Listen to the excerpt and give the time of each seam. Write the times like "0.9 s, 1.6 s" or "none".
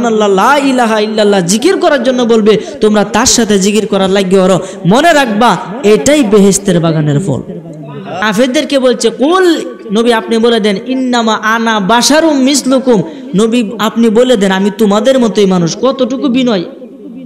8.2 s